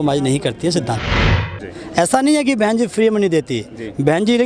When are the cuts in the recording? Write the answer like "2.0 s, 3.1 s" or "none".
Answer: 1.2 s